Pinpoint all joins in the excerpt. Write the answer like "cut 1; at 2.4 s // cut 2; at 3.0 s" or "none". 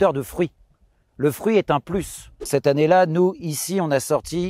cut 1; at 2.5 s

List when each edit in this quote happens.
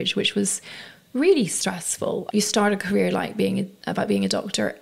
cut 1; at 2.2 s

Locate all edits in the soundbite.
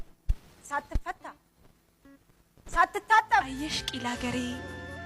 cut 1; at 3.5 s

